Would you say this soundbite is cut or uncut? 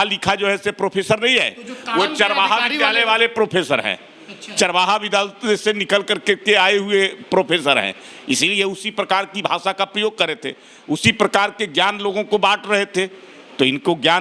uncut